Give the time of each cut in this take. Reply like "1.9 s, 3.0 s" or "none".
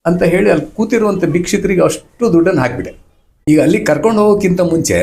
3.3 s